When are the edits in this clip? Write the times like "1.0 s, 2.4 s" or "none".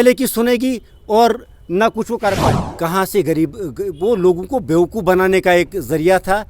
2.6 s